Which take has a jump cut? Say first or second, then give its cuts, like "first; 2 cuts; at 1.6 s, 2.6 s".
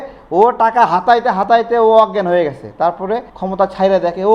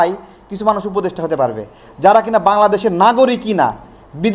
first; 1 cut; at 3.4 s